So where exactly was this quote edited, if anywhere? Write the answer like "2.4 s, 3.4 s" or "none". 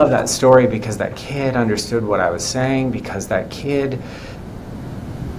none